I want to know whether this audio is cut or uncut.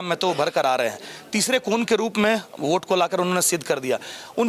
uncut